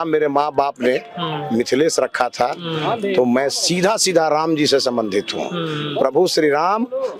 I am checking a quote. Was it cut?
no; 0 cuts

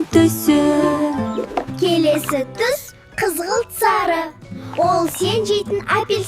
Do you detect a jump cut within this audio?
yes; 1 cut; at 1.4 s

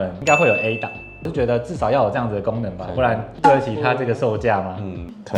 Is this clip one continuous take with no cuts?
no; 1 cut; at 1.3 s

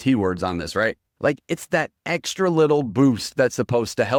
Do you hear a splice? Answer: no; 0 cuts

